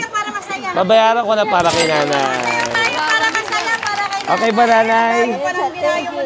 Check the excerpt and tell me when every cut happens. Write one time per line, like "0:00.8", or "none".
none

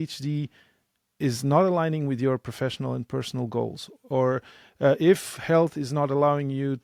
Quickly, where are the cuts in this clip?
none

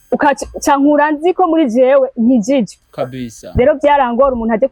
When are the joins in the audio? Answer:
none

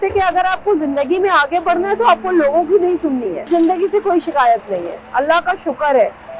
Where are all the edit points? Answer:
0:03.4

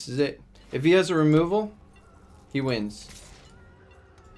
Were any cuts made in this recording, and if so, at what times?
none

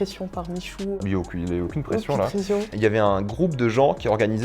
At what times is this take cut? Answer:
0:01.0
0:02.7

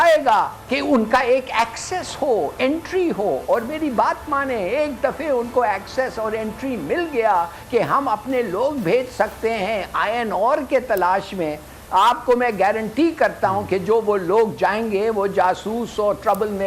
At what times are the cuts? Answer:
none

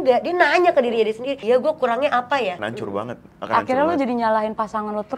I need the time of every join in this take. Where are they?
0:01.4
0:02.7

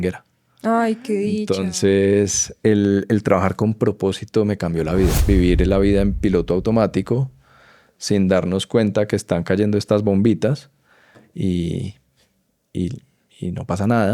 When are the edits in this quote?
0:05.2

